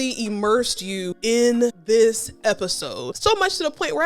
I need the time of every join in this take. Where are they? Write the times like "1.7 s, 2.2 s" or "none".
1.4 s, 3.1 s